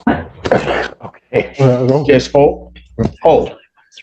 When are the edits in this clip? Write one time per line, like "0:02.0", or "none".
none